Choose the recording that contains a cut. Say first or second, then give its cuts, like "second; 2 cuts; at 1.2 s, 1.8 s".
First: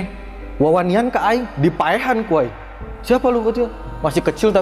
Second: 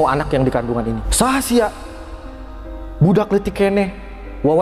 second; 1 cut; at 1.0 s